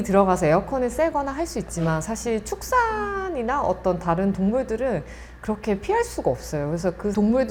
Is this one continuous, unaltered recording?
yes; 0 cuts

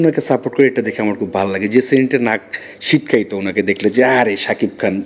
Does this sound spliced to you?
no; 0 cuts

